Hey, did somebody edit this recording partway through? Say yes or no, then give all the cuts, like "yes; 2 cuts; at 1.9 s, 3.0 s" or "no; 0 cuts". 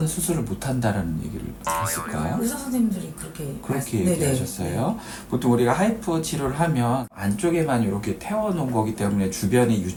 no; 0 cuts